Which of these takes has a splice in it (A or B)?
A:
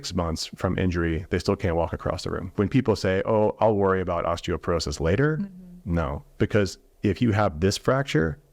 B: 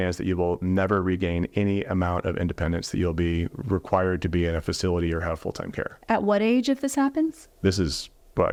A